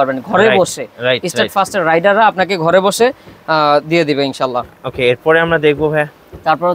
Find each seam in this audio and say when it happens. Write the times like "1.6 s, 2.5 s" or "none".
none